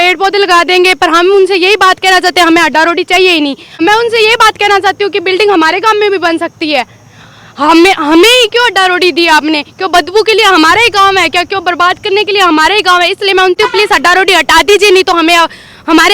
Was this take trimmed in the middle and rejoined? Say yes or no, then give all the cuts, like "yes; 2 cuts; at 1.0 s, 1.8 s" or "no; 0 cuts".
yes; 2 cuts; at 3.7 s, 13.6 s